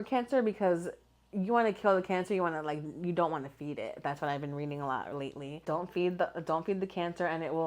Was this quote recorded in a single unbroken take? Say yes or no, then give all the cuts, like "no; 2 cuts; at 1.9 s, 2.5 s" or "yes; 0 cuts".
no; 1 cut; at 5.6 s